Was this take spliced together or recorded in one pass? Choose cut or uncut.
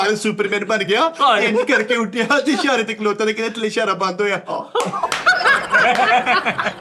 uncut